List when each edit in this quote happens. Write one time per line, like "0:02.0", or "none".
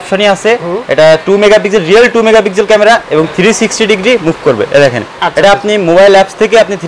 none